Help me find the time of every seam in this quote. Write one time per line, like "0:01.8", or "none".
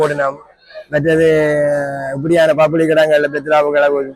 none